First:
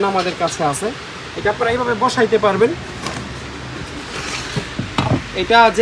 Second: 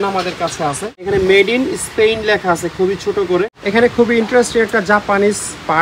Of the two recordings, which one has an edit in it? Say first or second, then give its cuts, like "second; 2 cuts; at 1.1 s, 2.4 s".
second; 2 cuts; at 1.1 s, 3.6 s